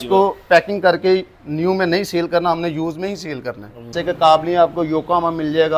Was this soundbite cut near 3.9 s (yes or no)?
yes